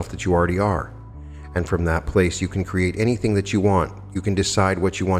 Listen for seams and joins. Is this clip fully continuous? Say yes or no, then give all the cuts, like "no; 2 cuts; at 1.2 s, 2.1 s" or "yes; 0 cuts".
yes; 0 cuts